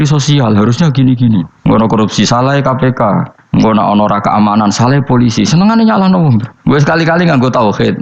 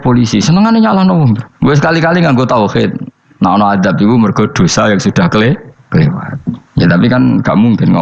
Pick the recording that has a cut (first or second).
first